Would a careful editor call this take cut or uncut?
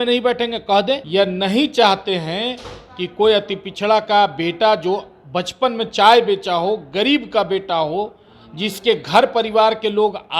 cut